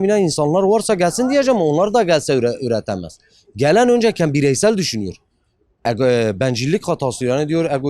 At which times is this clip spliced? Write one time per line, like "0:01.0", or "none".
none